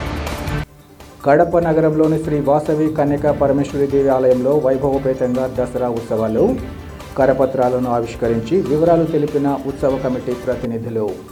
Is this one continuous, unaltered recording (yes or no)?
yes